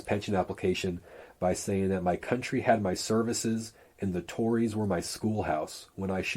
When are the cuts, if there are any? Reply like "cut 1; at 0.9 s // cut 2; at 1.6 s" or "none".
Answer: none